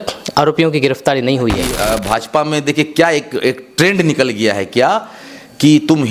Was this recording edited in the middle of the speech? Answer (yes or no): yes